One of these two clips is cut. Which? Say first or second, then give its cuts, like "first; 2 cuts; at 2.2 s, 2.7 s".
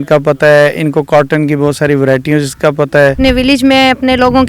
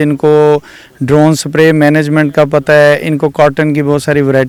first; 1 cut; at 3.2 s